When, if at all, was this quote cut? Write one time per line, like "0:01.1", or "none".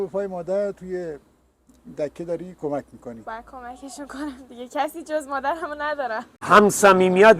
0:06.3